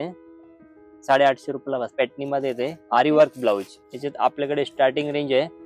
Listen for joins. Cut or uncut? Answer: cut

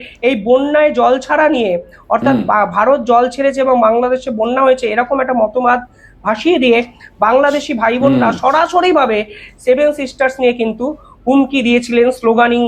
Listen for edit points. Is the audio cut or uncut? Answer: uncut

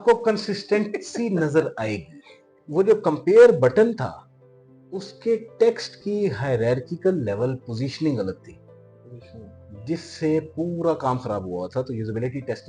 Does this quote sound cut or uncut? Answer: cut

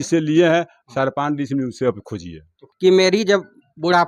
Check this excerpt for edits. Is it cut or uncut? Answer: cut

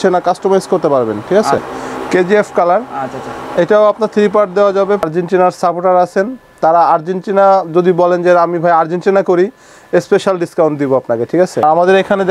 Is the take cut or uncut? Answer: cut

